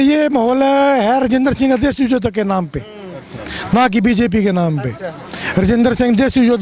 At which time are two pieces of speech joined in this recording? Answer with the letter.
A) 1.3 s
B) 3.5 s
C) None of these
C